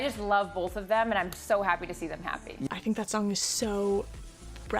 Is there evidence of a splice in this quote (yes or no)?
yes